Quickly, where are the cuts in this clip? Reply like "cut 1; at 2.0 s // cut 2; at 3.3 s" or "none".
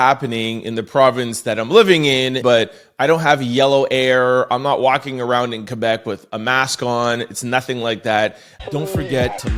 none